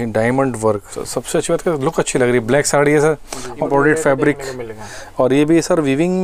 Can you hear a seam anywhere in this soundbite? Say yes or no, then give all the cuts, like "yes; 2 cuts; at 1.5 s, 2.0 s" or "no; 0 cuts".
yes; 2 cuts; at 0.9 s, 3.7 s